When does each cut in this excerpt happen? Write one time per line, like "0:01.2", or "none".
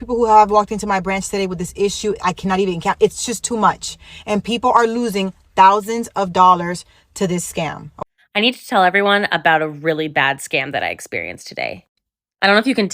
0:07.9